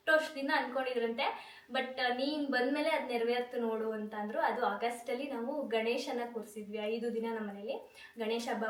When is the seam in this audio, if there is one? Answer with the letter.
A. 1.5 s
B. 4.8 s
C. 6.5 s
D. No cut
D